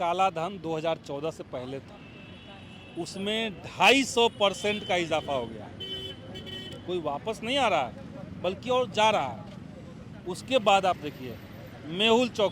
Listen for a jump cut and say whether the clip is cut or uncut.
uncut